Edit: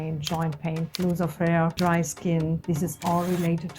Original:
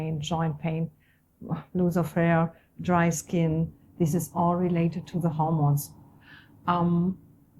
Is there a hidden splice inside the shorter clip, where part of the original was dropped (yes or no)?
yes